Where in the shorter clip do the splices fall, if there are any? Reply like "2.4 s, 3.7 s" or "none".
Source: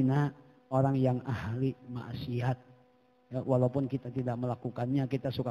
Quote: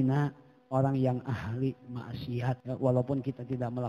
2.6 s